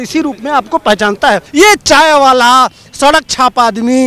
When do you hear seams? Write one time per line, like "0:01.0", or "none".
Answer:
0:01.5